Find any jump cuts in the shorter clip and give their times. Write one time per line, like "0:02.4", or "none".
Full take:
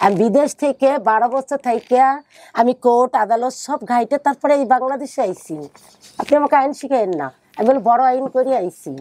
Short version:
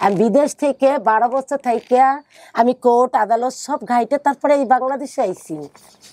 none